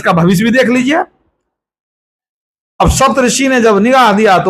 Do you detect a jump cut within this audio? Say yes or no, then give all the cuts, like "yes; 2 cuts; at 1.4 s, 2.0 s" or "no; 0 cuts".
no; 0 cuts